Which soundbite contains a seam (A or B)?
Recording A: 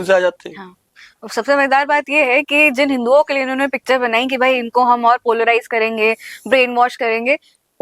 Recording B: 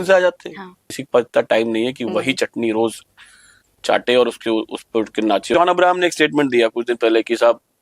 B